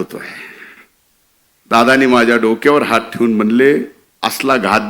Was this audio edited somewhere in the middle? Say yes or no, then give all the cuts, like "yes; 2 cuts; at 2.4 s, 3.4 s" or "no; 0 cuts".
yes; 1 cut; at 4.0 s